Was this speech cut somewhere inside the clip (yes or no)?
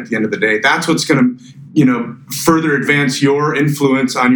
no